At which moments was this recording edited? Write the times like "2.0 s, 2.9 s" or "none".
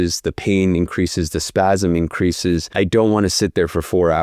2.7 s